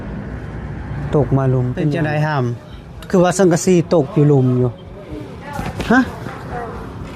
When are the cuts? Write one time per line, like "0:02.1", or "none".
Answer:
0:01.9